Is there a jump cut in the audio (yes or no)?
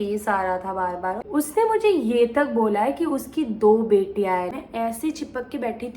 yes